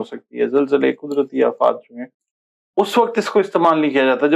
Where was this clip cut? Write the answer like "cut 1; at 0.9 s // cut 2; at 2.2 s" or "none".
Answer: cut 1; at 2.2 s